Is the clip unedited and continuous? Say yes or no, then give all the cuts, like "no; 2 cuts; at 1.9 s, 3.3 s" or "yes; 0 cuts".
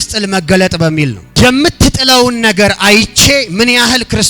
no; 1 cut; at 1.2 s